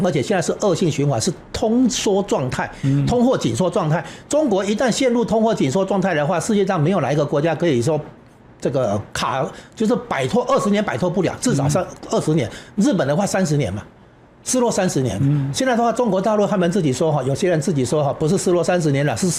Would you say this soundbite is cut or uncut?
uncut